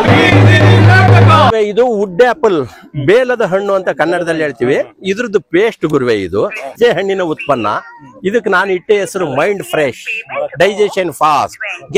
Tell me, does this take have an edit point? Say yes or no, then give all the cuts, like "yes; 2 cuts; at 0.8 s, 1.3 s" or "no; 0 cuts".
yes; 2 cuts; at 1.5 s, 6.8 s